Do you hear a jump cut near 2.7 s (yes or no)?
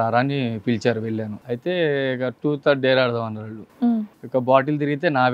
no